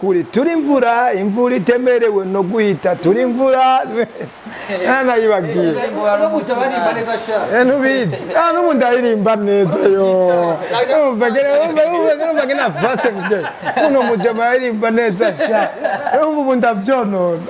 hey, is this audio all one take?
yes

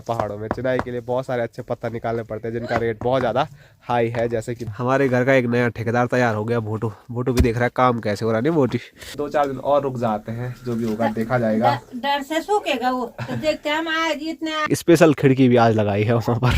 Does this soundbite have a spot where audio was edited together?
yes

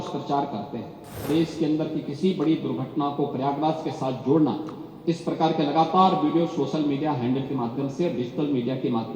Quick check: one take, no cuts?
no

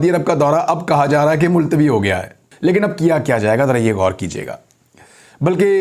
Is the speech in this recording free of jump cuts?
yes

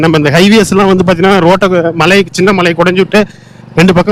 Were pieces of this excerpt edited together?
no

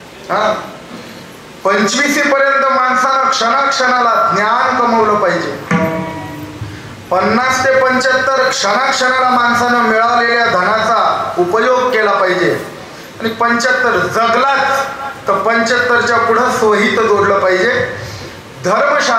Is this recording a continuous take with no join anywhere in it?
yes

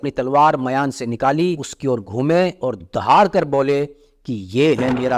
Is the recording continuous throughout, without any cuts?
yes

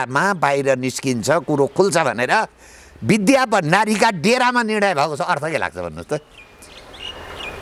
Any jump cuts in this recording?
no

